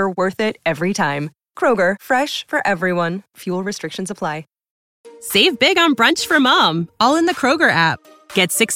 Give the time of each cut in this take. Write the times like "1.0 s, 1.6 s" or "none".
4.8 s